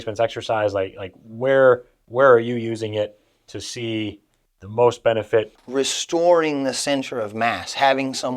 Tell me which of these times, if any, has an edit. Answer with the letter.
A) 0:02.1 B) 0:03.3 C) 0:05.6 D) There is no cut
C